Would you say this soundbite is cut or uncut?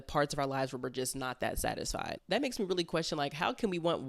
cut